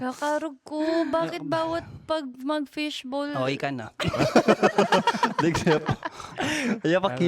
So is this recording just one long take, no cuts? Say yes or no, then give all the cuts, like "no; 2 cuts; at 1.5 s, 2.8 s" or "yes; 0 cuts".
yes; 0 cuts